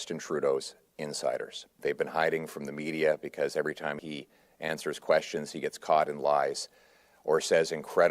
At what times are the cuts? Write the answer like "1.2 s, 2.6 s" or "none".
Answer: 1.7 s, 4.0 s